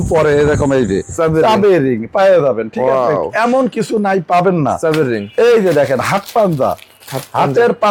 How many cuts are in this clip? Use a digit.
0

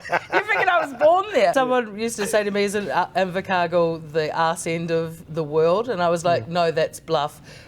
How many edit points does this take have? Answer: 1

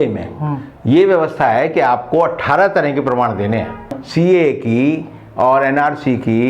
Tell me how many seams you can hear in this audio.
1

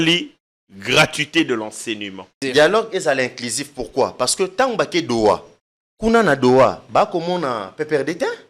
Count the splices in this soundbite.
1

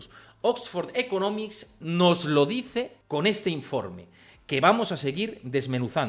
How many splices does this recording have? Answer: 1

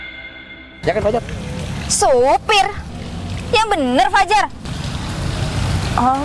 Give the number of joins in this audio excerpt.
1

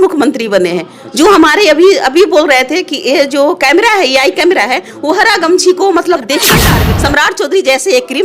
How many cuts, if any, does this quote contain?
1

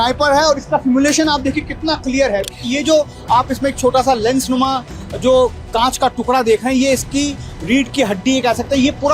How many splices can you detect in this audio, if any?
1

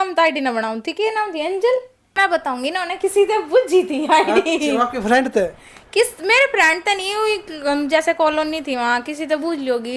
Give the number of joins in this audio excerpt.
1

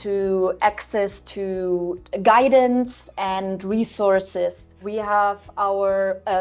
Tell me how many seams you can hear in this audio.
1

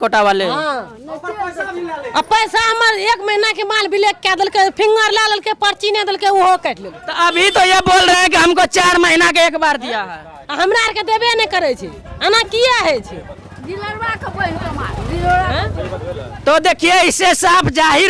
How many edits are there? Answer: 0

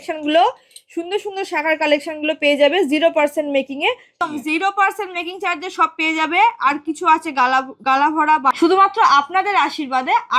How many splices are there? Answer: 2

